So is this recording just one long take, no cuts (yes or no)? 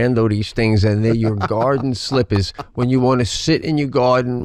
yes